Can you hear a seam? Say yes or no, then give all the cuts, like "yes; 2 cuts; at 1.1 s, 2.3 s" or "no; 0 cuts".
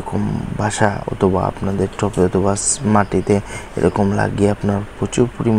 no; 0 cuts